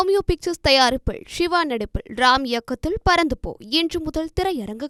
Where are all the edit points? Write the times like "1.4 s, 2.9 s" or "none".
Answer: none